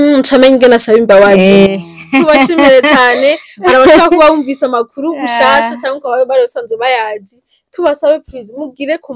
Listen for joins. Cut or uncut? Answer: uncut